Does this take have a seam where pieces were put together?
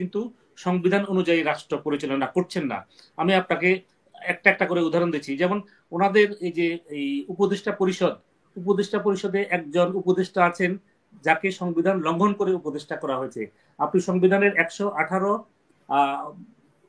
no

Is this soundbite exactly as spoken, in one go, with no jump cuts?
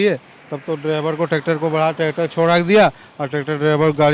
yes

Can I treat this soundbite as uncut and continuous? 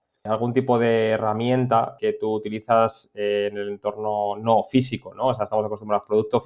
no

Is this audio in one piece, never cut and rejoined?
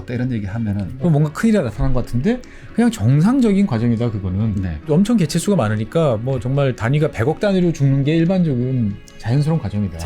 no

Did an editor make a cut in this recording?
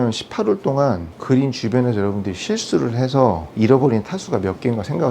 yes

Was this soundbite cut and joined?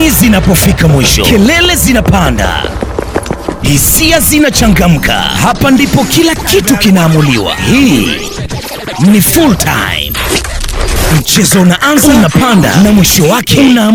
no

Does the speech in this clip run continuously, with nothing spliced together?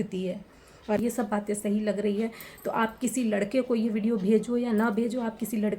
no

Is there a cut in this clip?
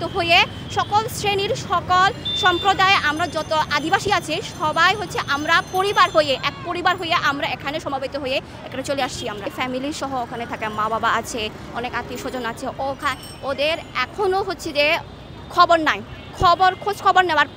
yes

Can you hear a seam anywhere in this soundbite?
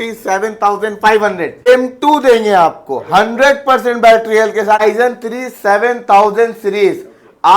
yes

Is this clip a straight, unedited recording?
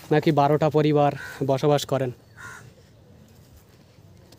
yes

